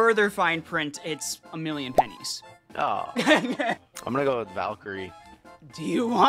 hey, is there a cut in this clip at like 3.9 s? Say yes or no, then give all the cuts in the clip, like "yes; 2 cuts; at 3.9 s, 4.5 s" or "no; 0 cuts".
yes; 1 cut; at 3.9 s